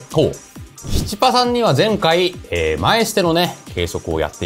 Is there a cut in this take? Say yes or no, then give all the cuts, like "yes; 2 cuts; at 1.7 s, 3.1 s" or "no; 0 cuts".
yes; 1 cut; at 1.0 s